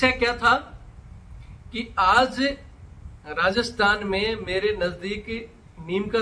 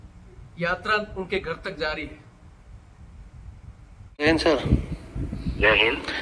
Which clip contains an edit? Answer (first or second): second